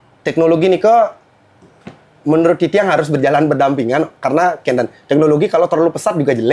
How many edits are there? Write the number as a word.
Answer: zero